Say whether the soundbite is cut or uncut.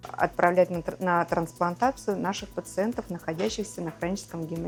uncut